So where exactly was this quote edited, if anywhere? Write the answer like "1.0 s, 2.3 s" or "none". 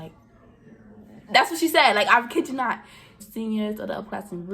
3.2 s